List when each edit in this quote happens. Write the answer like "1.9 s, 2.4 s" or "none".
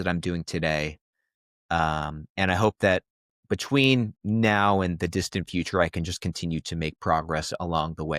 none